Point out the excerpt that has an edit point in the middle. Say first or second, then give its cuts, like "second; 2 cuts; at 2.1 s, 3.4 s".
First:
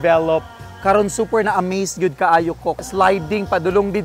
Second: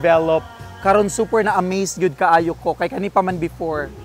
first; 1 cut; at 2.8 s